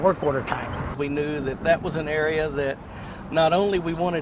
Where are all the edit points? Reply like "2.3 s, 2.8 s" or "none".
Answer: 0.9 s